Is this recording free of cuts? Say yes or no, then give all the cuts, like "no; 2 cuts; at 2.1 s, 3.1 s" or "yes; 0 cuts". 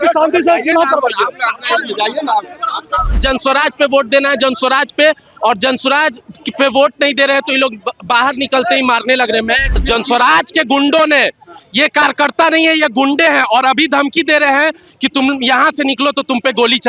no; 2 cuts; at 3.1 s, 9.7 s